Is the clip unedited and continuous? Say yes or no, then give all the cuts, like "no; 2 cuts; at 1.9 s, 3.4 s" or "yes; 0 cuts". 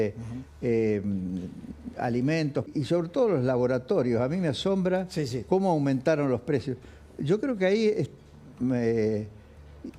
no; 1 cut; at 2.7 s